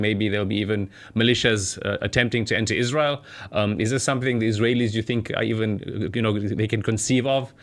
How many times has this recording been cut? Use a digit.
0